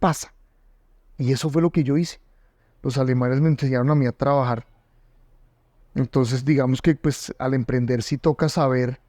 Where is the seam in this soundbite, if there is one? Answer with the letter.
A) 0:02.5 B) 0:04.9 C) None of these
A